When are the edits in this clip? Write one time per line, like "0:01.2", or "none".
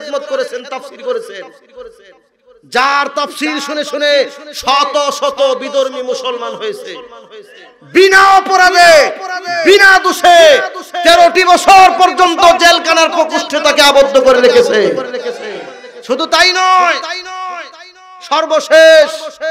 none